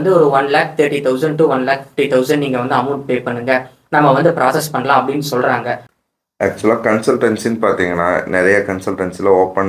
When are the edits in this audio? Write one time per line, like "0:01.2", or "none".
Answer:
0:05.9